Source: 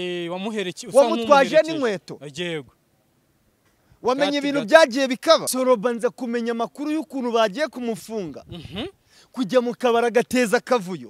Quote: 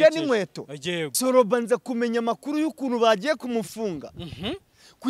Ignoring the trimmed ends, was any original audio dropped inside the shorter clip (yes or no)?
yes